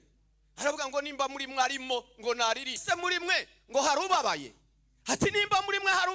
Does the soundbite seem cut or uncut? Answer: cut